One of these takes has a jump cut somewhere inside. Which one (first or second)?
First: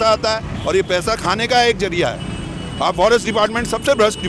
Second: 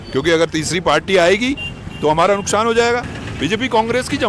second